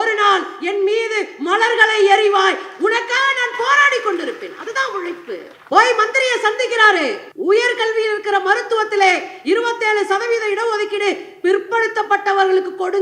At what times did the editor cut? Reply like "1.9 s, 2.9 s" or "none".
5.5 s, 7.3 s